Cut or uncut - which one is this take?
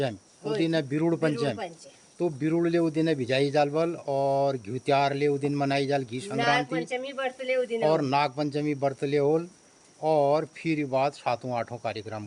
uncut